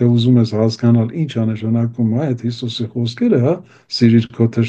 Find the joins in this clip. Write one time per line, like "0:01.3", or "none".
none

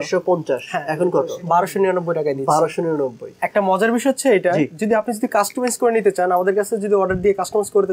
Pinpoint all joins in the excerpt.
0:03.4

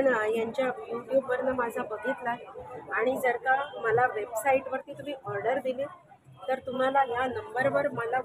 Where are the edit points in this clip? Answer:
none

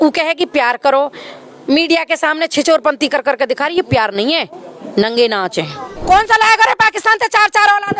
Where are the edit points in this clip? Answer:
0:06.0

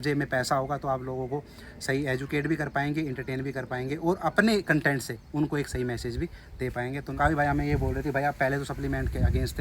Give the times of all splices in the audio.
0:07.1

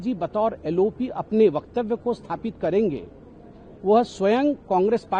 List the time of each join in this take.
none

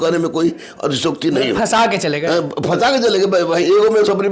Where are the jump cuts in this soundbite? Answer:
none

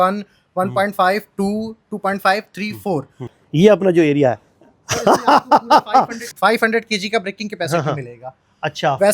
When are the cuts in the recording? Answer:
0:03.3
0:06.2

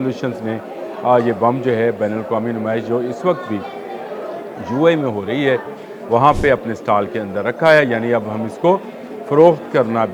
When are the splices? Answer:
none

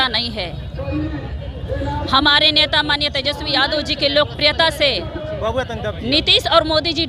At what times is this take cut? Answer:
none

